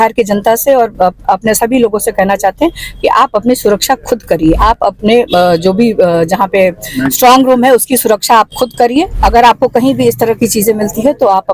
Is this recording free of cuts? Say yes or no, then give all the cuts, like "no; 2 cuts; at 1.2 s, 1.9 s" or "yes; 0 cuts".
no; 2 cuts; at 4.6 s, 9.1 s